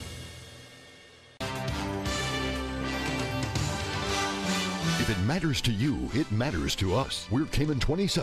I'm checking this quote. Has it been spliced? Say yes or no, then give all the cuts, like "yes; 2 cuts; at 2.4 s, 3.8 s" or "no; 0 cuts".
yes; 1 cut; at 1.2 s